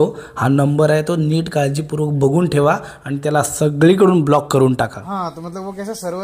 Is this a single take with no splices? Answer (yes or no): no